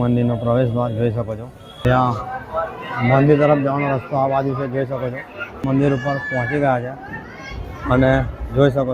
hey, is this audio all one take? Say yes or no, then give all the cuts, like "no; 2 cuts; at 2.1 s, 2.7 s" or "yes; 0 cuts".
no; 2 cuts; at 1.9 s, 5.7 s